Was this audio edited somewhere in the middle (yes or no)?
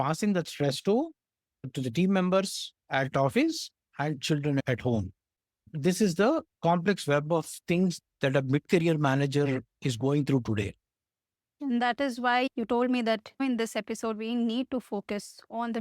no